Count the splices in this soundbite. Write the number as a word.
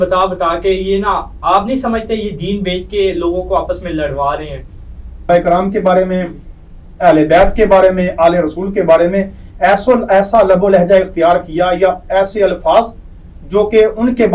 one